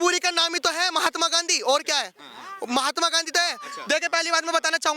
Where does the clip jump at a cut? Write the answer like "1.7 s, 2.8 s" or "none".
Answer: none

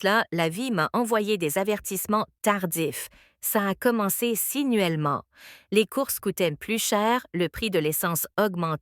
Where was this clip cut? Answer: 6.6 s

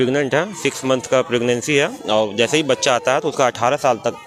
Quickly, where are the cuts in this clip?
none

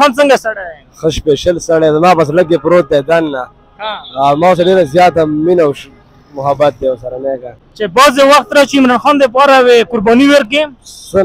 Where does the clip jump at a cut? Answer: none

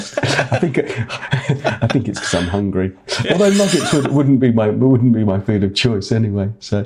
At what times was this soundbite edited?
none

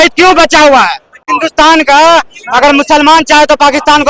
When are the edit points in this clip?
1.3 s

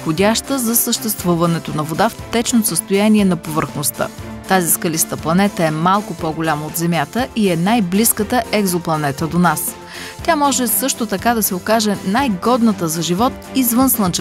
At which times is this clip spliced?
4.3 s

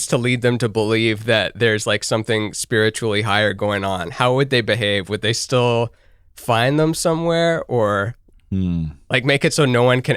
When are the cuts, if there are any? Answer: none

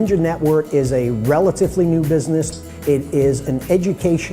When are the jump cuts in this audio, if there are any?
2.5 s

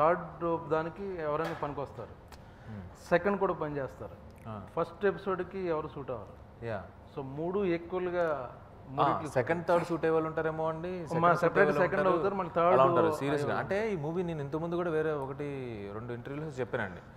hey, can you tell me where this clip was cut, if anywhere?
none

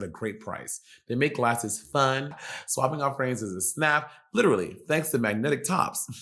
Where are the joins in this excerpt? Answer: 2.4 s

